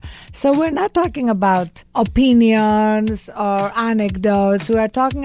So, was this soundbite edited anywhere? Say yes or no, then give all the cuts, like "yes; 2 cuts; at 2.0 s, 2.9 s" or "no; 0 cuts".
yes; 1 cut; at 1.8 s